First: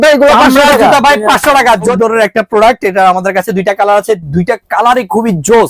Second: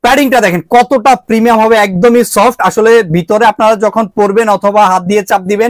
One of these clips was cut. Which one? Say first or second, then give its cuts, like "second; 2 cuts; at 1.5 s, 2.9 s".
first; 1 cut; at 1.9 s